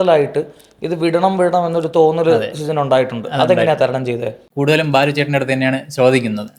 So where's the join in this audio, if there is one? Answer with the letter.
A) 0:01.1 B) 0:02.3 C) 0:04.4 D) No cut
C